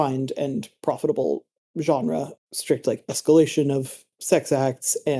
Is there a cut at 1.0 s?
no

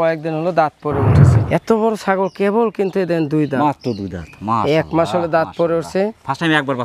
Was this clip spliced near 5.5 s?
no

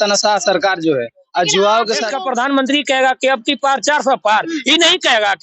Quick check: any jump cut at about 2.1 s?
yes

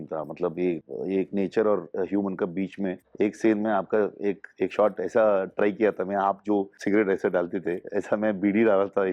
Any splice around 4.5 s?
no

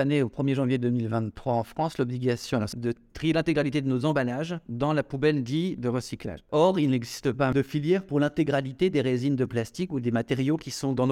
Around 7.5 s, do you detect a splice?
yes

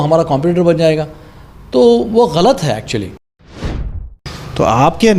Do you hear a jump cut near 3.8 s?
yes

